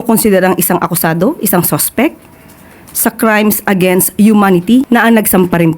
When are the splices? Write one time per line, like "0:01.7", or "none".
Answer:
0:04.9